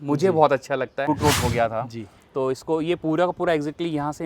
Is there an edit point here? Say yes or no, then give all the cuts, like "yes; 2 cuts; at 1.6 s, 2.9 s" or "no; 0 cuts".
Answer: yes; 1 cut; at 1.1 s